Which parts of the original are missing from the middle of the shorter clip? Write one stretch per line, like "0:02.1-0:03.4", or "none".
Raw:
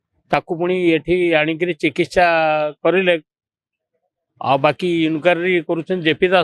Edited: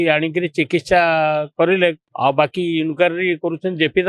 0:03.3-0:04.3